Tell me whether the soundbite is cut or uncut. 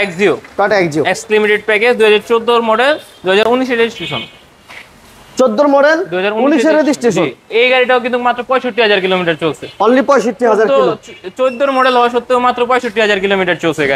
uncut